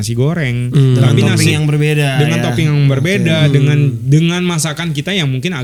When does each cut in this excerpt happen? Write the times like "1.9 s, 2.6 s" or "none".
none

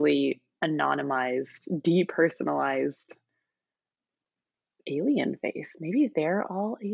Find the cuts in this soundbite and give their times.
none

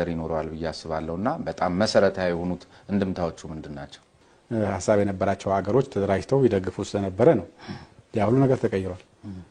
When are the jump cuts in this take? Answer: 4.1 s

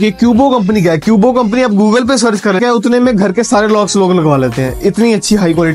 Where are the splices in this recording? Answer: 2.6 s

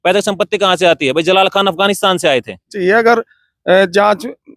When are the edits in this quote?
2.7 s

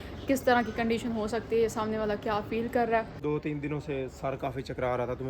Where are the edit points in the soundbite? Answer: 3.1 s

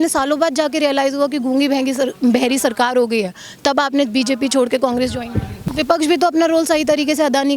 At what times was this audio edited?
5.5 s

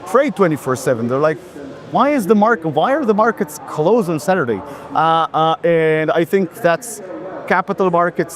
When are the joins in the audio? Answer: none

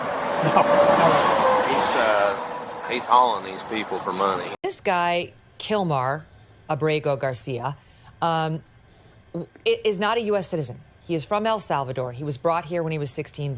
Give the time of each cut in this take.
4.5 s

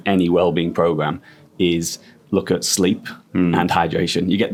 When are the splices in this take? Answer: none

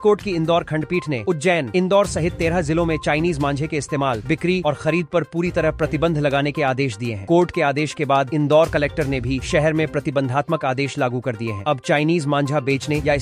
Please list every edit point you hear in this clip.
none

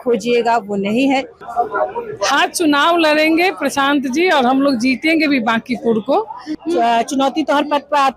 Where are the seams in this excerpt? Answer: 1.4 s, 6.5 s

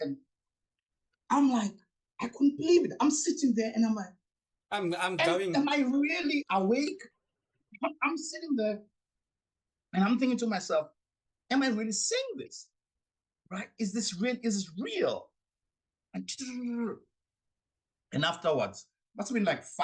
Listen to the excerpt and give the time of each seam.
7.0 s

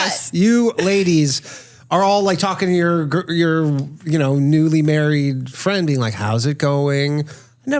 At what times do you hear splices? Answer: none

